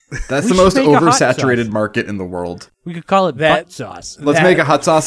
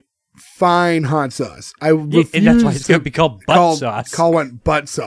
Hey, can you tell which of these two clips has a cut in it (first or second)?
first